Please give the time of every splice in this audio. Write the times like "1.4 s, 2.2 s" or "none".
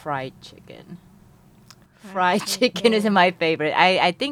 none